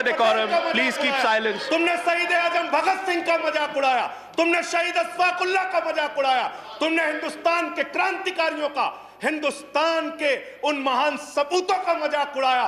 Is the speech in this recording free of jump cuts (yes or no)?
yes